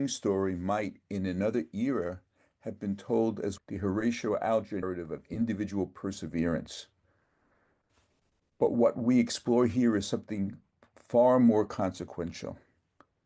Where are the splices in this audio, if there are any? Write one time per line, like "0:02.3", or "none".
0:03.6
0:04.8